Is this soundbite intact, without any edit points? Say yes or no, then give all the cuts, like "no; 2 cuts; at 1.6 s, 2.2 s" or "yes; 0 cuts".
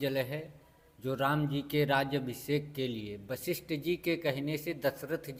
yes; 0 cuts